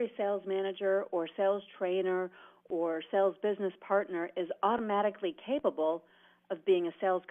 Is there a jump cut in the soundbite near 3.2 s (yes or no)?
yes